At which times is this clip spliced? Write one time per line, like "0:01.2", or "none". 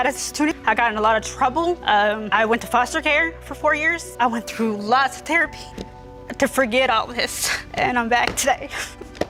none